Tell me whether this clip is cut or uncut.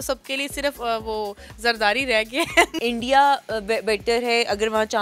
cut